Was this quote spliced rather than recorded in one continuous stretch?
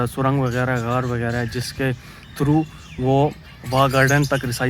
no; 0 cuts

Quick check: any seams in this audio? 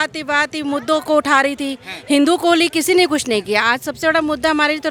no; 0 cuts

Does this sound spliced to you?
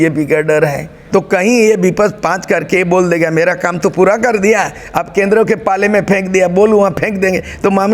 yes; 1 cut; at 0.9 s

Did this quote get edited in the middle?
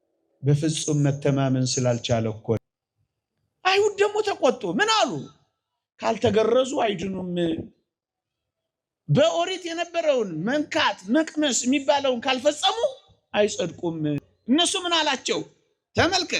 yes; 2 cuts; at 2.6 s, 14.3 s

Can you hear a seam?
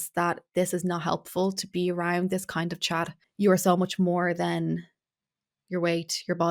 no; 0 cuts

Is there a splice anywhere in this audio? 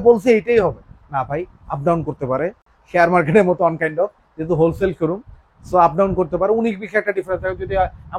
no; 0 cuts

